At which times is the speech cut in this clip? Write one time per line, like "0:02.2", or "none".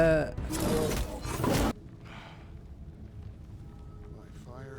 0:01.7